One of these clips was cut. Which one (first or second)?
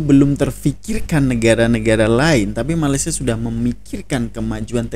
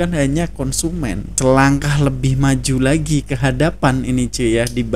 second